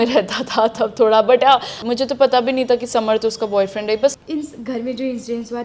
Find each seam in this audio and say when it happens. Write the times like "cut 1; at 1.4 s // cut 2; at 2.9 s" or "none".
cut 1; at 1.8 s // cut 2; at 4.2 s

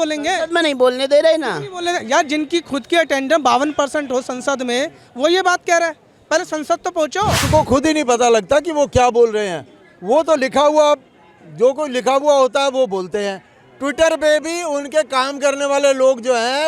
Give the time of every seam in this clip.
cut 1; at 7.5 s

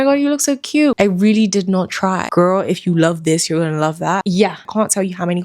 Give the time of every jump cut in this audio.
cut 1; at 1.0 s // cut 2; at 2.3 s // cut 3; at 4.6 s

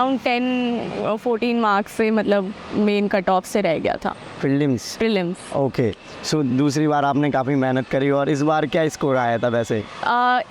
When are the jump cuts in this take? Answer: none

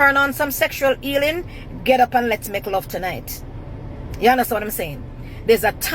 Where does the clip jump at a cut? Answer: none

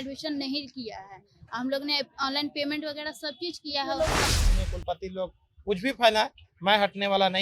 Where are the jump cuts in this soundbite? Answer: cut 1; at 4.3 s

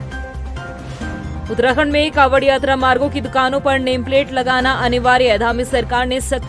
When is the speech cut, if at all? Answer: cut 1; at 1.1 s

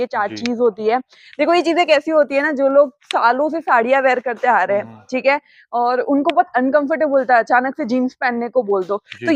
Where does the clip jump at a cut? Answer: none

